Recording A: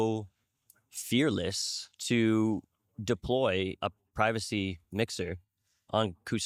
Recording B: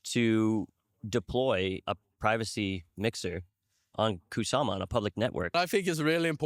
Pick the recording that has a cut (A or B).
B